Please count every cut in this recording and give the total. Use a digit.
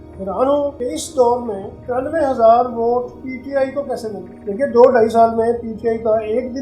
4